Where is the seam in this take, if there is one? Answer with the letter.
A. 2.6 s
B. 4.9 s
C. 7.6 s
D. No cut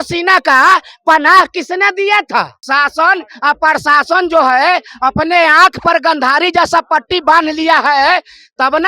A